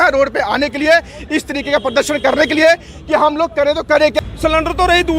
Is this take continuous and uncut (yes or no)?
no